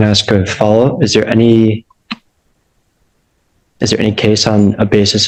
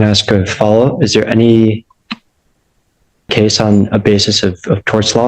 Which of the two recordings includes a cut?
second; 1 cut; at 3.3 s

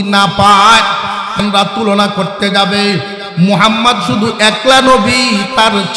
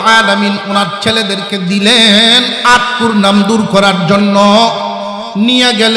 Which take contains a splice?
first; 1 cut; at 1.4 s

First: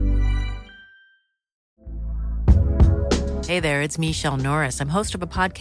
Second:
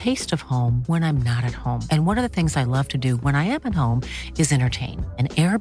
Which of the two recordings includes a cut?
first; 1 cut; at 1.7 s

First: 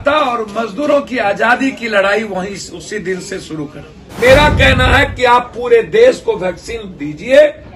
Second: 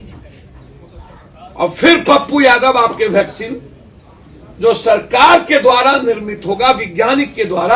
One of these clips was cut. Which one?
first; 1 cut; at 4.0 s

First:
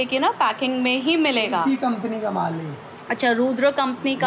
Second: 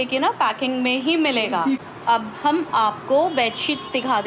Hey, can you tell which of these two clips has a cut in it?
second; 1 cut; at 1.8 s

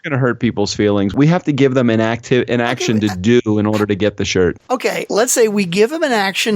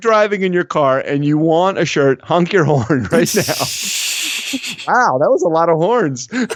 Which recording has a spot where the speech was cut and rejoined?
first; 2 cuts; at 1.1 s, 4.7 s

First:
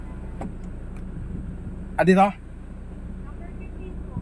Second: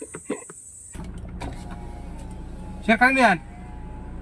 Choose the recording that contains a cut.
second; 1 cut; at 1.0 s

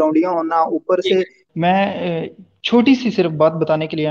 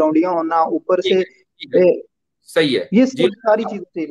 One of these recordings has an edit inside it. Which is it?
first; 1 cut; at 1.4 s

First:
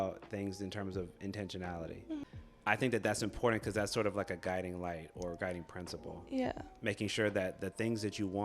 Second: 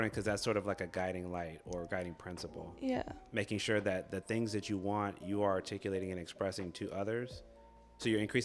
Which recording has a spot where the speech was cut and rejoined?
first; 1 cut; at 2.2 s

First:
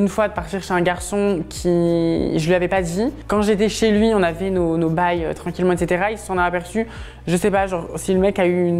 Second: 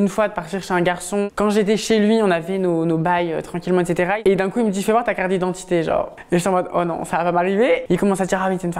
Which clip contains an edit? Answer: second; 3 cuts; at 1.3 s, 4.2 s, 7.8 s

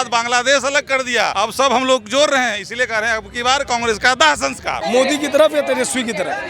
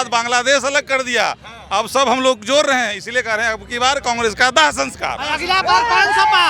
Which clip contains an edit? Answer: first; 2 cuts; at 1.3 s, 4.7 s

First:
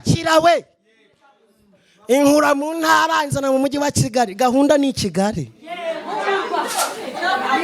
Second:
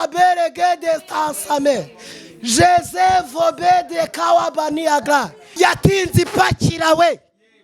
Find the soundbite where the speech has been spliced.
second; 1 cut; at 5.4 s

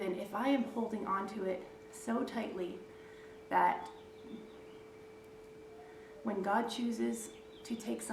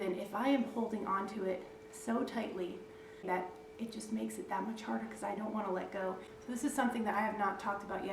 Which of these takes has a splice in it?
second; 2 cuts; at 3.3 s, 6.3 s

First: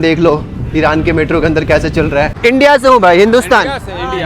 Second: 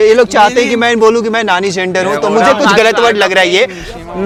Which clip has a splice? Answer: first; 1 cut; at 2.3 s

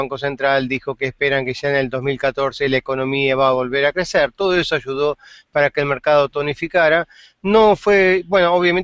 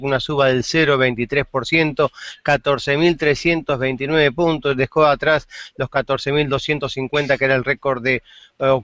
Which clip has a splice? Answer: first; 1 cut; at 1.5 s

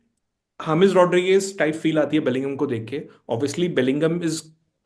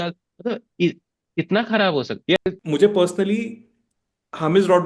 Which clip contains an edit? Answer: second; 1 cut; at 2.4 s

